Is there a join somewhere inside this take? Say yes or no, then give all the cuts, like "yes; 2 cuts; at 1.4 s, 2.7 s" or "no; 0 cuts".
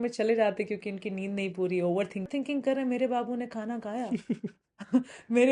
yes; 1 cut; at 2.3 s